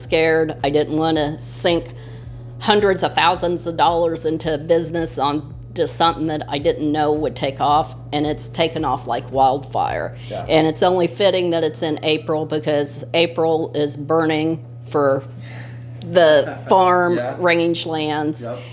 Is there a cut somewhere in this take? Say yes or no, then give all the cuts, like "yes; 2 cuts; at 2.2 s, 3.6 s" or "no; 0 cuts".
no; 0 cuts